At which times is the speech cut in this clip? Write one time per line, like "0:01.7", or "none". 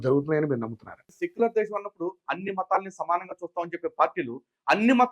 0:01.1